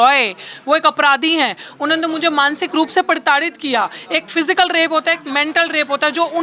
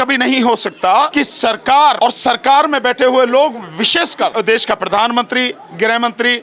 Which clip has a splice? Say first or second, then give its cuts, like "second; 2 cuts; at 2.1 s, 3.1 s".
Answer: second; 3 cuts; at 1.1 s, 2.0 s, 4.3 s